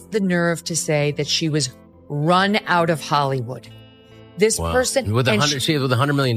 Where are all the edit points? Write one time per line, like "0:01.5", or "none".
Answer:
none